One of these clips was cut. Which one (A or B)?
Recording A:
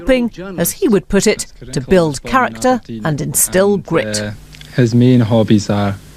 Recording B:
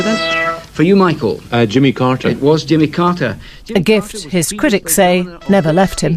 B